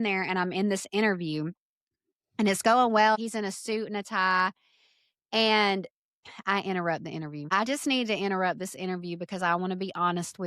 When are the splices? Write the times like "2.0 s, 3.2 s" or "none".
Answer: 3.2 s, 7.5 s